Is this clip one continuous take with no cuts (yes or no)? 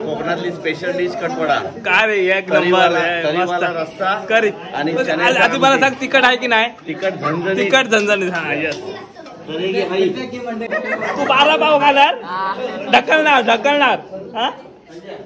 no